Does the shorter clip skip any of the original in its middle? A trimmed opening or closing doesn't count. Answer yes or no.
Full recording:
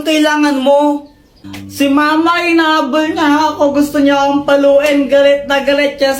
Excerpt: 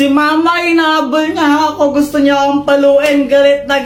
no